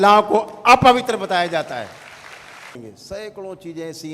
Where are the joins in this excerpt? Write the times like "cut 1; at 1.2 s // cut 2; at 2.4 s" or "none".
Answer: cut 1; at 2.8 s

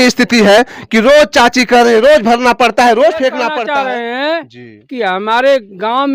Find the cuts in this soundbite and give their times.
cut 1; at 3.5 s

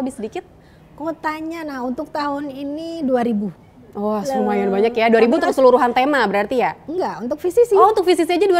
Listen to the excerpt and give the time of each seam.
none

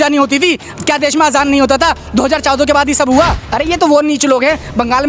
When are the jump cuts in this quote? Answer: cut 1; at 3.4 s

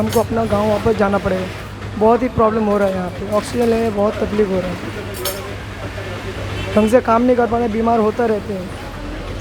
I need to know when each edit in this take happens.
none

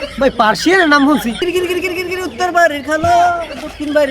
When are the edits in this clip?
cut 1; at 1.4 s

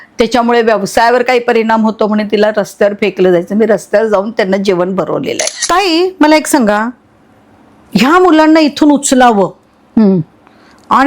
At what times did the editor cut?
cut 1; at 5.6 s

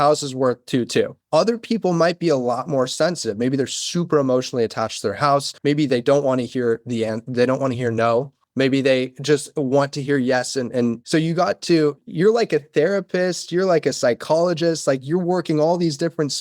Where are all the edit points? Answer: cut 1; at 12.0 s

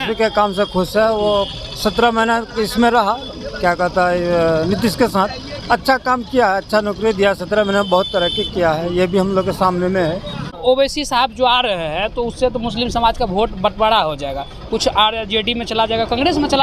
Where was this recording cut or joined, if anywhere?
cut 1; at 10.6 s

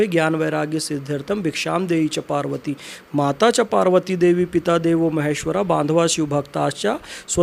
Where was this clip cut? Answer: none

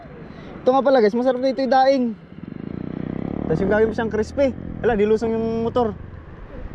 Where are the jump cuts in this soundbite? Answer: none

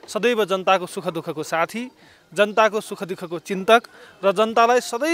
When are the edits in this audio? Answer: none

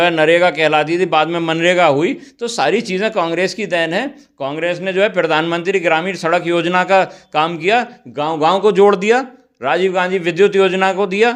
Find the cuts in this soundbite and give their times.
none

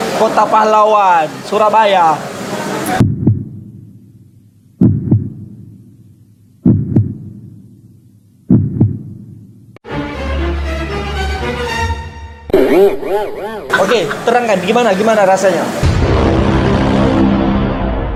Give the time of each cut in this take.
none

